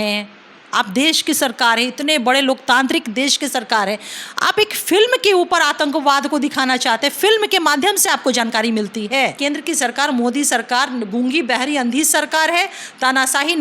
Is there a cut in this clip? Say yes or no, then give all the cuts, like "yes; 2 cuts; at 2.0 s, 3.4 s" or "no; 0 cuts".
yes; 1 cut; at 9.4 s